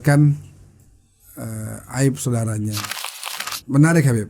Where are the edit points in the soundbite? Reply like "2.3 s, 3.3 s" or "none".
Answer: 3.3 s